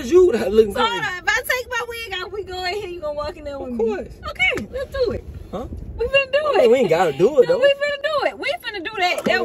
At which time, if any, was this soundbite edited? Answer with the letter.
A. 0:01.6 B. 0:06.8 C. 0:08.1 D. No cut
D